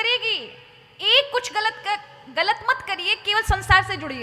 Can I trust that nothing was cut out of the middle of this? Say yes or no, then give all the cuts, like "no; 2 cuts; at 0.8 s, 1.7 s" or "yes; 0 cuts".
yes; 0 cuts